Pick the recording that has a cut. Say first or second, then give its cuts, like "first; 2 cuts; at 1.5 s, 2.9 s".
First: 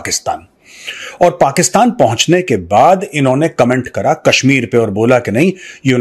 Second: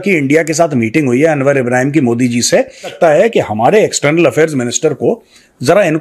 second; 1 cut; at 2.9 s